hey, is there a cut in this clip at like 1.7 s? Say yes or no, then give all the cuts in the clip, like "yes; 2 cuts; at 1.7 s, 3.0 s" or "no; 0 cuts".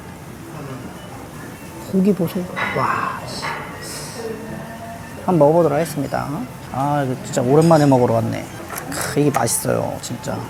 no; 0 cuts